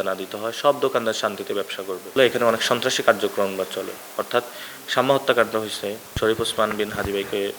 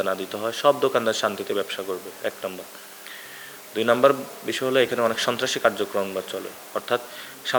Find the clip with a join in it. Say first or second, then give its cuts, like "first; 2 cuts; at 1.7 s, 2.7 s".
first; 2 cuts; at 2.1 s, 6.2 s